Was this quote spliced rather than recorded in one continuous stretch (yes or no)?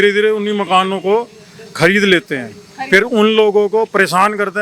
no